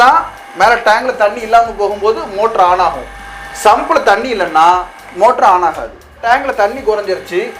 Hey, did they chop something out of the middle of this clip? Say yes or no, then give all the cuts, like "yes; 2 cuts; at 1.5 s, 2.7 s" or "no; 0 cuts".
yes; 1 cut; at 6.2 s